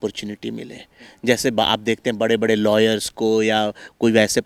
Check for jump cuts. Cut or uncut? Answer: uncut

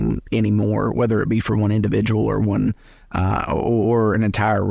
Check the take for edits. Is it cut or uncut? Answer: uncut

